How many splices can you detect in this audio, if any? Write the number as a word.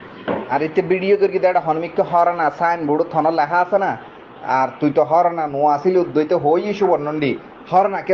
zero